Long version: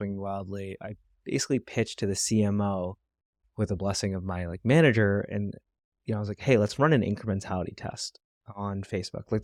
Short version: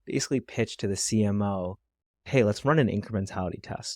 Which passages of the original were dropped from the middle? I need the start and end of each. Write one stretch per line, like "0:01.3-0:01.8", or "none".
0:03.4-0:06.3